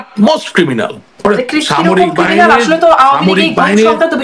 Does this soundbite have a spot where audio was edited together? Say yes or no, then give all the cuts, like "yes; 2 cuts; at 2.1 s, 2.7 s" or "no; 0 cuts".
yes; 1 cut; at 1.2 s